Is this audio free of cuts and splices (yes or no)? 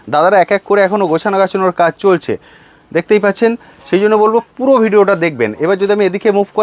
yes